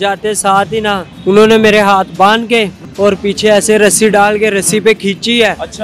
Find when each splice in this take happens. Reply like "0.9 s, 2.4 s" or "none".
1.1 s, 2.8 s